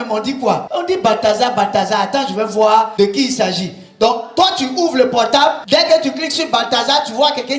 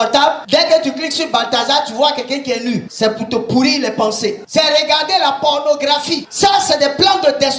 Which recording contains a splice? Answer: second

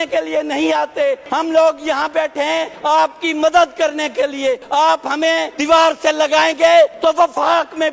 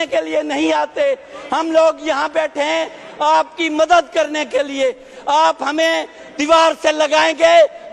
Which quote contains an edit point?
first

